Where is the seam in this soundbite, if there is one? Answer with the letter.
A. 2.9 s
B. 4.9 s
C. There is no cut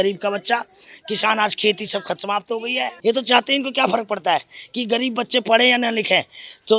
A